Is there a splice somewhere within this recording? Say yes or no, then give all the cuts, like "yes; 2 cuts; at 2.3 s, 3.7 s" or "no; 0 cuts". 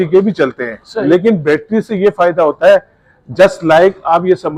no; 0 cuts